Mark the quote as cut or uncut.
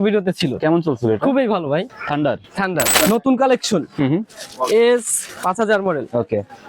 cut